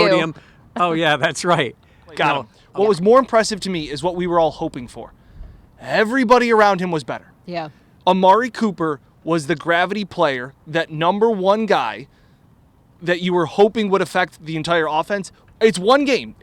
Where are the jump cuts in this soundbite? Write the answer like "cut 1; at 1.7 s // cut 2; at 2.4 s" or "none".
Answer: cut 1; at 2.6 s

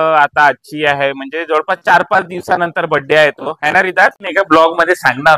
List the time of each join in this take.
cut 1; at 4.2 s

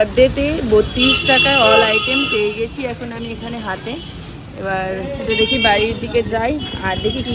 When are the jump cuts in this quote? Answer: none

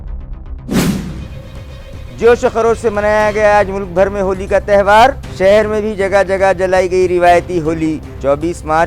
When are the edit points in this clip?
cut 1; at 0.9 s

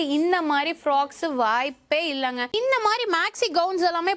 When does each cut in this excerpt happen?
cut 1; at 2.5 s

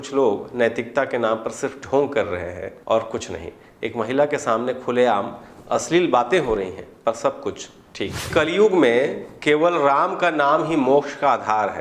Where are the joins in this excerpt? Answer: cut 1; at 2.7 s // cut 2; at 8.3 s

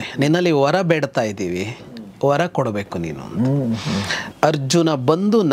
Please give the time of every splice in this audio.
cut 1; at 4.2 s

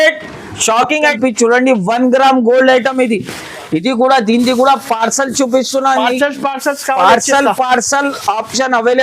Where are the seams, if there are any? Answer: cut 1; at 1.1 s

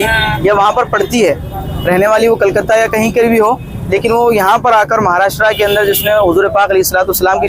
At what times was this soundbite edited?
none

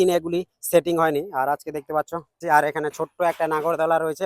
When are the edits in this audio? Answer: cut 1; at 2.4 s

